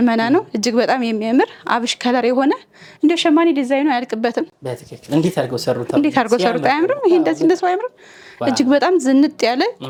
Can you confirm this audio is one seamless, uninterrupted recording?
yes; 0 cuts

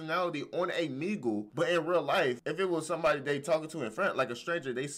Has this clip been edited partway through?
yes; 2 cuts; at 1.5 s, 2.4 s

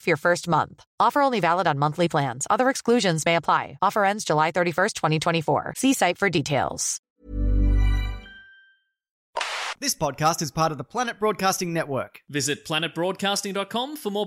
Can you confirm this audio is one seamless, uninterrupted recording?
no; 2 cuts; at 7.1 s, 9.6 s

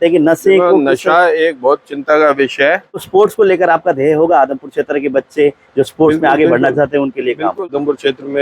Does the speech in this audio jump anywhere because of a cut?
yes; 2 cuts; at 3.0 s, 7.7 s

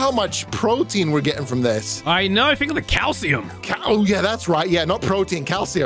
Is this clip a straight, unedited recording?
yes; 0 cuts

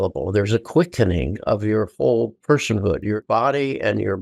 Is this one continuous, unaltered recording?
no; 1 cut; at 3.2 s

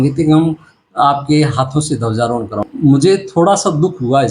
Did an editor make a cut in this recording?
yes; 1 cut; at 2.6 s

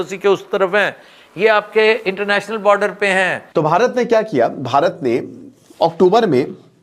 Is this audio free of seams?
no; 1 cut; at 3.4 s

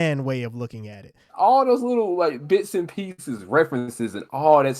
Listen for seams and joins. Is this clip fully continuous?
no; 1 cut; at 1.3 s

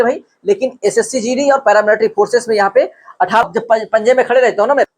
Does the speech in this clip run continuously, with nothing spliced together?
no; 1 cut; at 3.4 s

